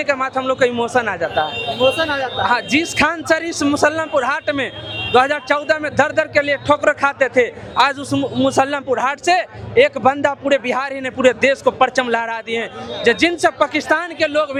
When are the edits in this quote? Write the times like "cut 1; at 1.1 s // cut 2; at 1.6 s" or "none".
none